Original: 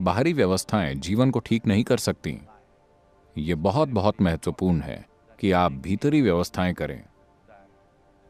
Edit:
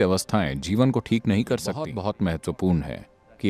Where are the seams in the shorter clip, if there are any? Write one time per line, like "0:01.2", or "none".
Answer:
0:01.9